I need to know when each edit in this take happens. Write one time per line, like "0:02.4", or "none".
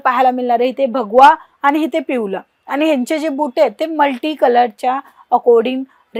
none